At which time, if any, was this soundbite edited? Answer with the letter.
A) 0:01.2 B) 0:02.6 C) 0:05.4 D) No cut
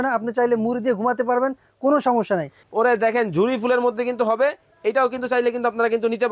B